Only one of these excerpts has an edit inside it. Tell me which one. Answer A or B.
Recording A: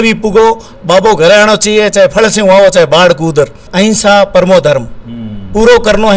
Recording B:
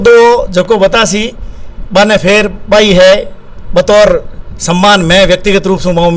A